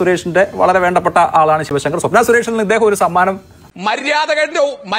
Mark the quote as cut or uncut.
cut